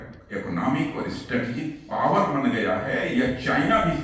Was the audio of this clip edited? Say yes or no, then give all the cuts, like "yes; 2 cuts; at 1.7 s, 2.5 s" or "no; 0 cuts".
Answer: no; 0 cuts